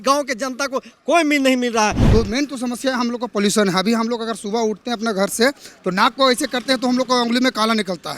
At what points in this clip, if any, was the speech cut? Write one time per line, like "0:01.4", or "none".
0:02.0